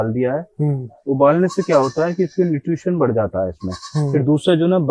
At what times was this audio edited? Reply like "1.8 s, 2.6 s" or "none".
none